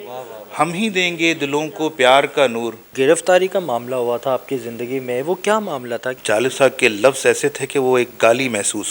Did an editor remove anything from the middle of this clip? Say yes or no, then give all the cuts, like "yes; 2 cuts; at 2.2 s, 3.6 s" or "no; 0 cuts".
yes; 2 cuts; at 2.9 s, 6.0 s